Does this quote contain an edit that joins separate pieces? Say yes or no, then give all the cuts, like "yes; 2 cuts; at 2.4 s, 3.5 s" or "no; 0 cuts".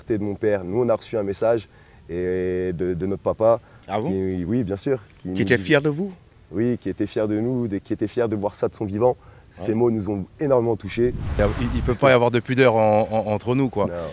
yes; 1 cut; at 11.3 s